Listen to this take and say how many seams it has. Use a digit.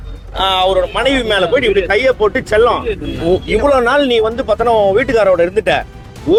0